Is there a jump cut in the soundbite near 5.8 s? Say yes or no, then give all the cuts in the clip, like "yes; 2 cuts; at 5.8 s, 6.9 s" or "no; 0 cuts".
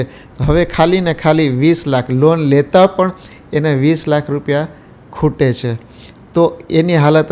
no; 0 cuts